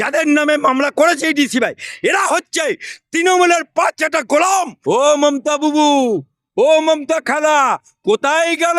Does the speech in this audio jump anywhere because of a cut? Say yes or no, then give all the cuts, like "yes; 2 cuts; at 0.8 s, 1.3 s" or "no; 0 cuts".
yes; 1 cut; at 4.7 s